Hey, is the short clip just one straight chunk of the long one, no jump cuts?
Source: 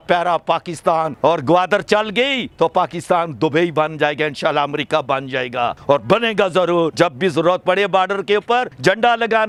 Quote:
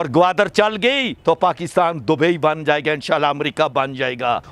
yes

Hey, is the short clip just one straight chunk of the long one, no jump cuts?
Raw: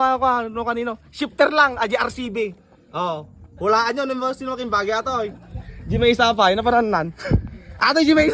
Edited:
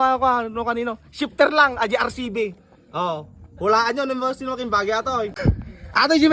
no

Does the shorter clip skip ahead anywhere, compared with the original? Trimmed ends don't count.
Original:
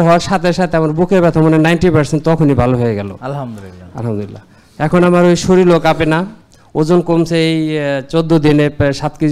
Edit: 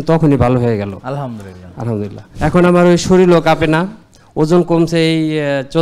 yes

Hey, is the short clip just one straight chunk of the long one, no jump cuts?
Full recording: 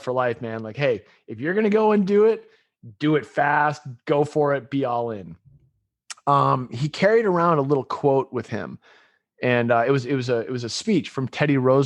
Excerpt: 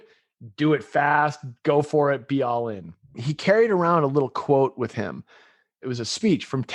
no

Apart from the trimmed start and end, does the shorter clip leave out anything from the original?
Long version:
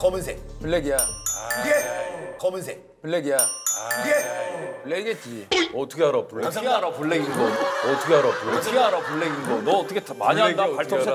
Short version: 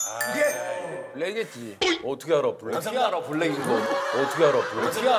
yes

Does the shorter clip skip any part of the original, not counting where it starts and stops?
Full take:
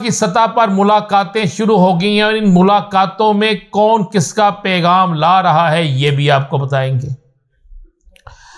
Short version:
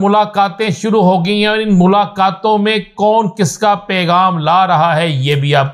no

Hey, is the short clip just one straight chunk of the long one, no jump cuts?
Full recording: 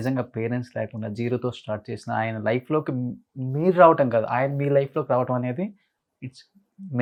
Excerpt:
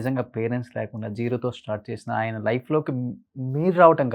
yes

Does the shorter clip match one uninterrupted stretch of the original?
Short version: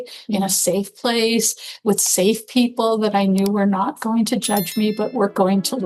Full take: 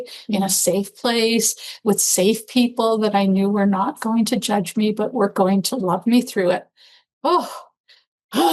yes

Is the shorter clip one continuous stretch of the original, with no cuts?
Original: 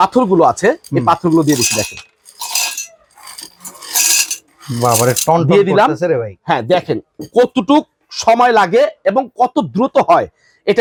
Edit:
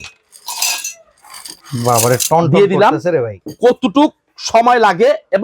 no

